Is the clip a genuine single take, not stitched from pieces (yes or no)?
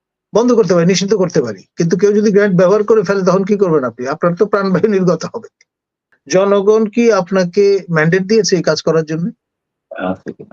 no